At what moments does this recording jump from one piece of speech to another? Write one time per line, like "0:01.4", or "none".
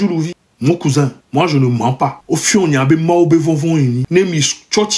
0:01.2
0:02.2
0:04.0

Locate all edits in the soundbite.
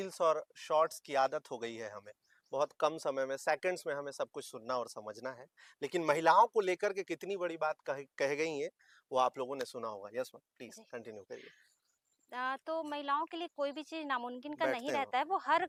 none

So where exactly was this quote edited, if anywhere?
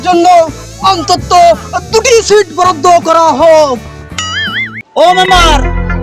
0:05.0

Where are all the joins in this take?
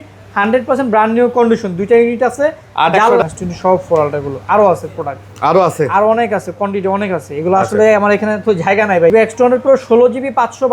0:03.2
0:09.1

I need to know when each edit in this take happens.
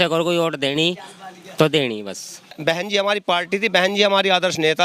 0:02.6

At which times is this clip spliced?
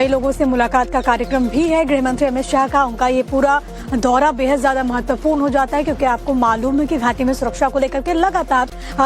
0:04.0

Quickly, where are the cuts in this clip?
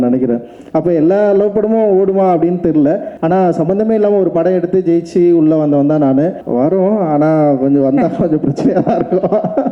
0:03.1
0:06.4

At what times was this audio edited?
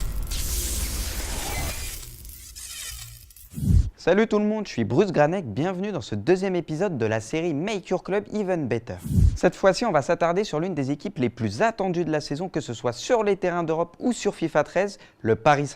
0:13.3

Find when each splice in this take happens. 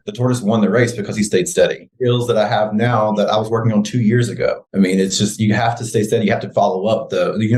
none

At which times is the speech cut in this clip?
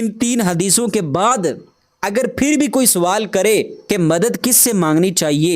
0:03.8

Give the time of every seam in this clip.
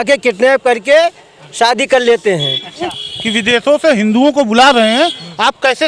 0:02.9

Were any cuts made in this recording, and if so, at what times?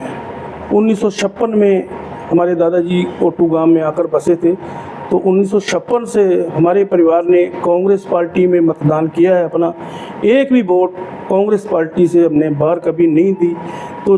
none

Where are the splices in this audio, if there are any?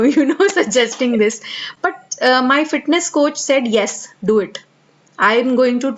none

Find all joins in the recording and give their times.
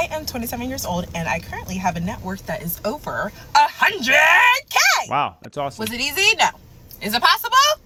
none

